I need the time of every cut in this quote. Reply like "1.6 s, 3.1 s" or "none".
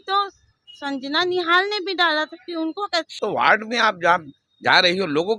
3.1 s